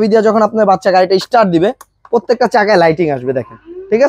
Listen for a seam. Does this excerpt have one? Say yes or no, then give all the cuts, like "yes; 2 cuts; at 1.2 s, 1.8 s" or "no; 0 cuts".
no; 0 cuts